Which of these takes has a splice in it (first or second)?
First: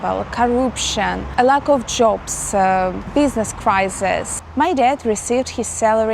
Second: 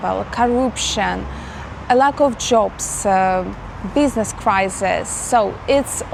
first